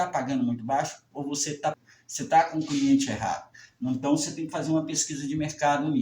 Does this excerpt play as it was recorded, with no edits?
no; 1 cut; at 1.4 s

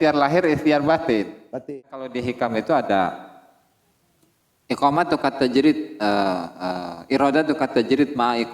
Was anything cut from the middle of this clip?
yes; 1 cut; at 1.5 s

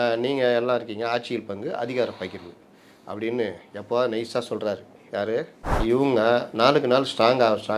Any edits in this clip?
yes; 1 cut; at 5.8 s

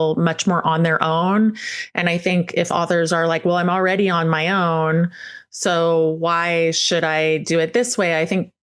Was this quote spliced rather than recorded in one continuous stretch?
no; 0 cuts

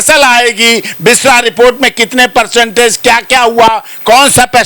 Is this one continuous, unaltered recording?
yes; 0 cuts

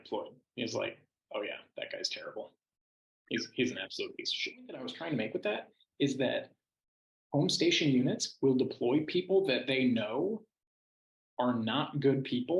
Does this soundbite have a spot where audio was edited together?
yes; 1 cut; at 4.9 s

